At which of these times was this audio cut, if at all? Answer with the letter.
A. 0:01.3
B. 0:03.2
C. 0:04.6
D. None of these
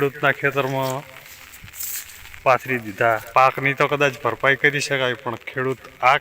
B